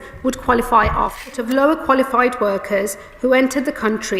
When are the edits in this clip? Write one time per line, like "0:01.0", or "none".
0:01.4